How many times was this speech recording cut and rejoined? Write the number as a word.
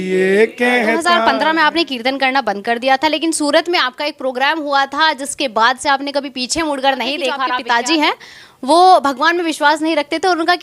two